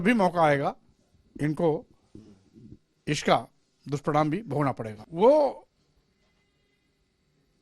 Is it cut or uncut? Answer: cut